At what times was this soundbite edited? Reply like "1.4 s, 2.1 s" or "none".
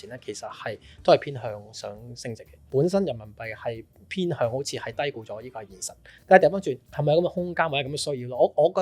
2.5 s, 6.9 s